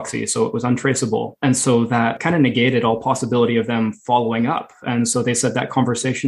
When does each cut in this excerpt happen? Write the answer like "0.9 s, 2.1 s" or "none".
1.3 s, 2.2 s

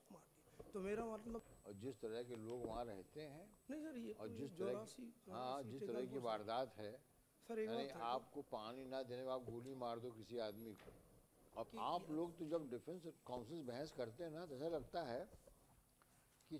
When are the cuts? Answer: 1.4 s, 11.7 s

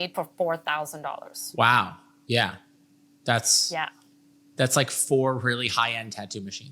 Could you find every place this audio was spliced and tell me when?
none

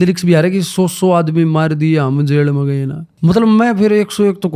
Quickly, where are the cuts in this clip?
3.0 s

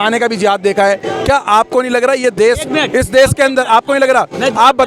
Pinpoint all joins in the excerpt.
none

